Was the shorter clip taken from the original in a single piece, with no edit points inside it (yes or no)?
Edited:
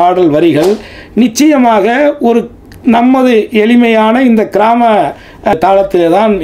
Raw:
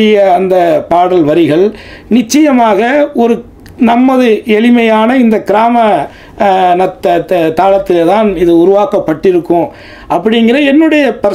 no